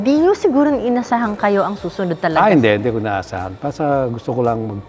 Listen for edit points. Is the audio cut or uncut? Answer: uncut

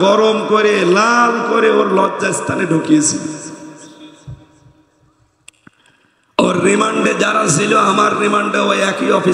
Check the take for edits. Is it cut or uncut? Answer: uncut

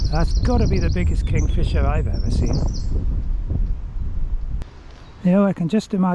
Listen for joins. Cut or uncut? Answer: cut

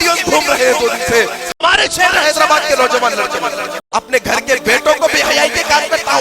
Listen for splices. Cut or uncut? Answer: cut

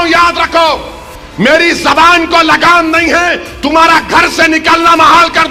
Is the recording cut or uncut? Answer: uncut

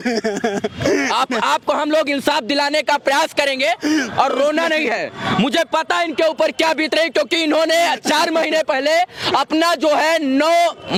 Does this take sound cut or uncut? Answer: uncut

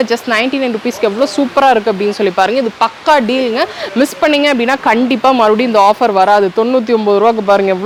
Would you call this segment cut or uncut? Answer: uncut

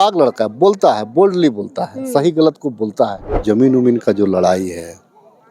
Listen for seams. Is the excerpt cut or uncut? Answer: cut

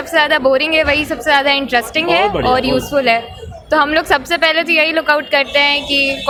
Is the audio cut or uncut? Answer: uncut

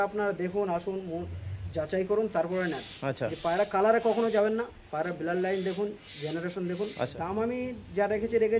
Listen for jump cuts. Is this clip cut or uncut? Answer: cut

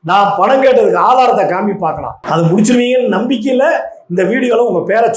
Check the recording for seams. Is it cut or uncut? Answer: cut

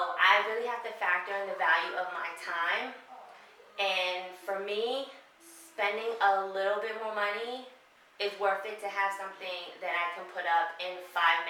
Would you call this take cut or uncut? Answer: uncut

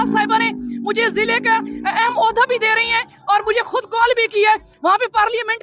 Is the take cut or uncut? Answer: cut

